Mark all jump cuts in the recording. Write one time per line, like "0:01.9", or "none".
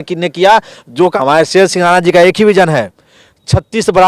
0:01.1